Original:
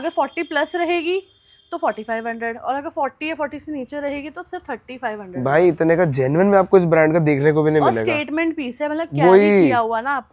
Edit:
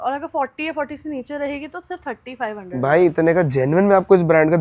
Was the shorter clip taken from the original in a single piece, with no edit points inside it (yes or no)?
yes